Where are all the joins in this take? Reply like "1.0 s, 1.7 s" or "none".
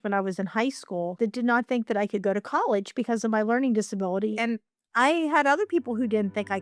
1.2 s, 4.3 s